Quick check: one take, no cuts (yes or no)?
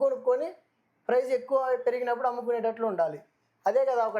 yes